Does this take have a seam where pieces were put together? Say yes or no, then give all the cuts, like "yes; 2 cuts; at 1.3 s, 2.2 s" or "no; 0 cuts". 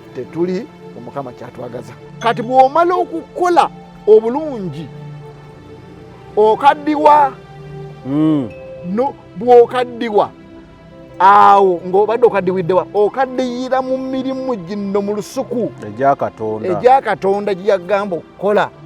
yes; 1 cut; at 2.0 s